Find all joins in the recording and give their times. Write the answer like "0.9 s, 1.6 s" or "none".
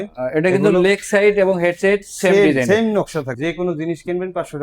3.2 s